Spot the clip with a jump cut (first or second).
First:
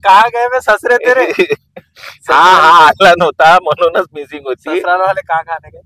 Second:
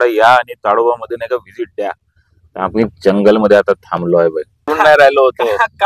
second